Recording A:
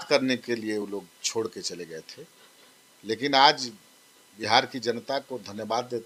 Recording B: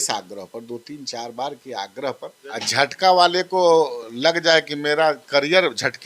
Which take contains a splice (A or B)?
B